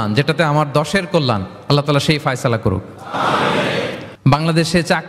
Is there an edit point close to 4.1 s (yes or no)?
yes